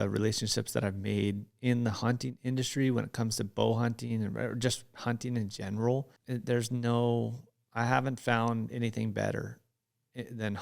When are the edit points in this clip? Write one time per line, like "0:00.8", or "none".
0:06.2